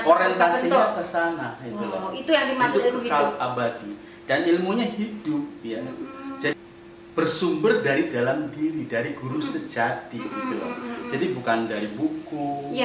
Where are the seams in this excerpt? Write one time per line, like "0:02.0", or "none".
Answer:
0:06.5